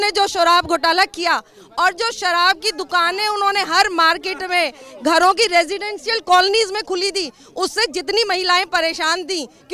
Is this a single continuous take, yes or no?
yes